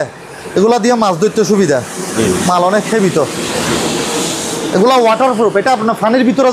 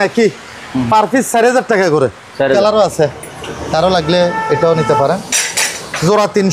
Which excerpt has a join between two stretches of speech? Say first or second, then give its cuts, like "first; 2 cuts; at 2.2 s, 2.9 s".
second; 1 cut; at 2.6 s